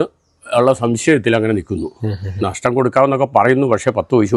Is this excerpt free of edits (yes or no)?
yes